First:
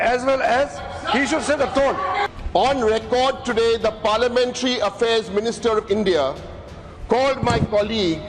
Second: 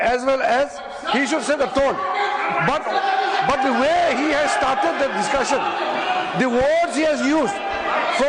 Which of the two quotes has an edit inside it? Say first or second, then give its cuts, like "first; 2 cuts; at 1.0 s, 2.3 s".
first; 1 cut; at 2.3 s